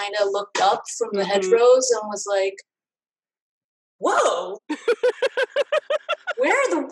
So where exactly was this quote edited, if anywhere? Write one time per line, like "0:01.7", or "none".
none